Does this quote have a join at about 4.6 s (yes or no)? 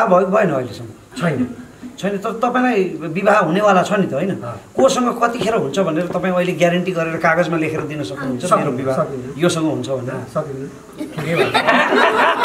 no